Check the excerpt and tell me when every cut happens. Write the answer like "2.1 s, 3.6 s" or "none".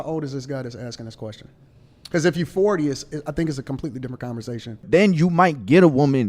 4.9 s